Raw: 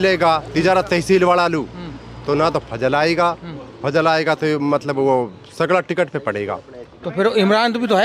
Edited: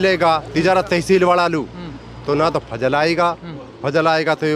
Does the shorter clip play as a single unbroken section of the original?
yes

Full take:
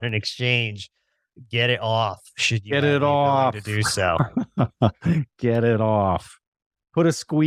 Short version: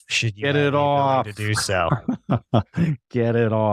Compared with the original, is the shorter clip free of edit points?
yes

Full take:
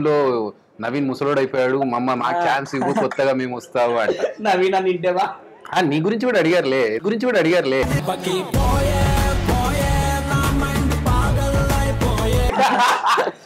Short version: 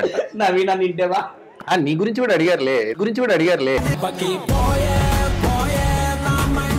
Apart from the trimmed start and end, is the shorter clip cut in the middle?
no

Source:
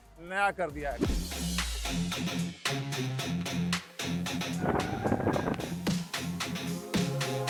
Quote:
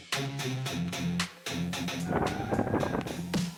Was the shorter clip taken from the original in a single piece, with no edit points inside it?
yes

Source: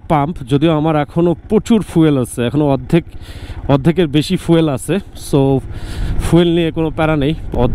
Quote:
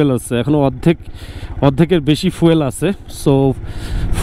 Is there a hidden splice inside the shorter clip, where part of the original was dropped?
no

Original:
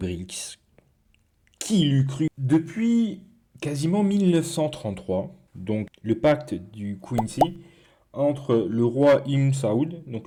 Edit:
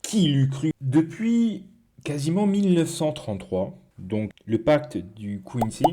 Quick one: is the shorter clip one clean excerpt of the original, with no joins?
yes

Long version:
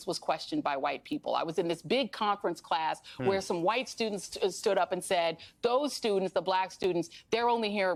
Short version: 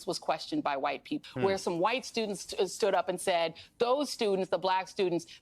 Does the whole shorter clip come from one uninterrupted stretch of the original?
no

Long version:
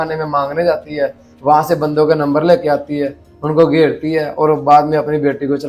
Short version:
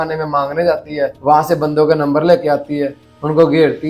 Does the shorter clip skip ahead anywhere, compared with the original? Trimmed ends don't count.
yes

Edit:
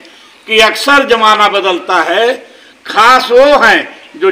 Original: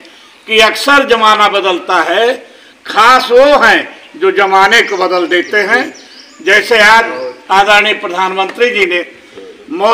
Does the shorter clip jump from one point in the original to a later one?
no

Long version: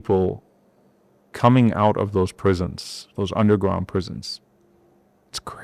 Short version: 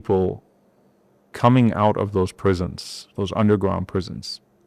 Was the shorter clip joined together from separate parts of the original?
no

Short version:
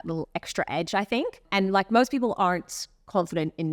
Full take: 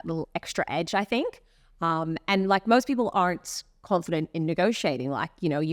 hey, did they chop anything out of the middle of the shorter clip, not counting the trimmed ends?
yes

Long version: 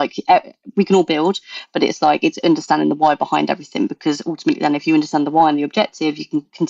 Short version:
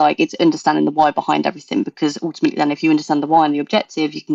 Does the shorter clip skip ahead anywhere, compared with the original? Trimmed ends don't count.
no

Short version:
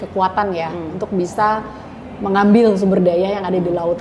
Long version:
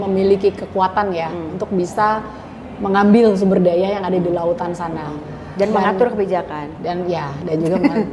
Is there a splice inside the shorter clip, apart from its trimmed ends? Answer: no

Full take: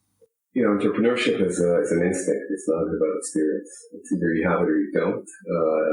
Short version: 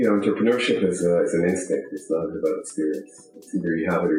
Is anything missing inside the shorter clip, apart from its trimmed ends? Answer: no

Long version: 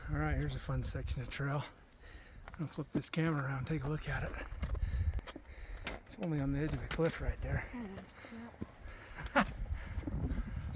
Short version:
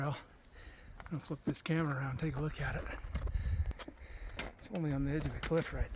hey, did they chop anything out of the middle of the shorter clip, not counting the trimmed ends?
no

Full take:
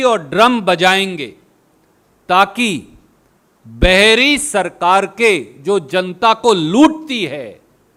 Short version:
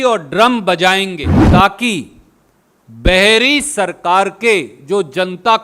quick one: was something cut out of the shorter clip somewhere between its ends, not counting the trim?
yes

